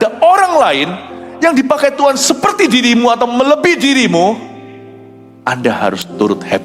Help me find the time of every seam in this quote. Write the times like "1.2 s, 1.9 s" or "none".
none